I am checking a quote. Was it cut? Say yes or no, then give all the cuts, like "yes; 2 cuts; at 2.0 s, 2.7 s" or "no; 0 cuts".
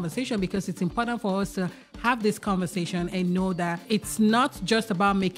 yes; 1 cut; at 3.8 s